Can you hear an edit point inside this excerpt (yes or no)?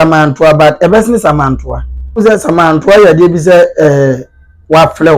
yes